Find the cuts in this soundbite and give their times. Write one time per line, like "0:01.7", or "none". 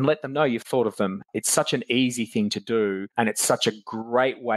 0:01.2